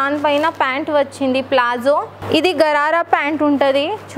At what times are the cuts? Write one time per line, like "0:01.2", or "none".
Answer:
0:02.1